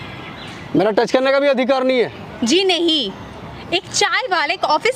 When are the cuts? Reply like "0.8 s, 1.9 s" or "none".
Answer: none